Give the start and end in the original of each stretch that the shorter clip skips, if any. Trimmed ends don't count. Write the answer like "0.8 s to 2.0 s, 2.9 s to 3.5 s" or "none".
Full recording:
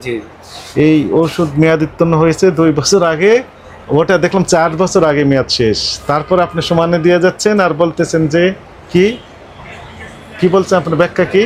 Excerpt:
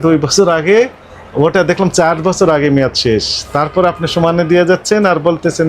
none